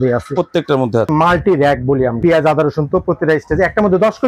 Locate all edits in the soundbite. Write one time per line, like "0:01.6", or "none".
0:01.1
0:02.2